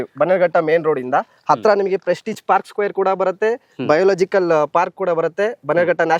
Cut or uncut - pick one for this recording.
uncut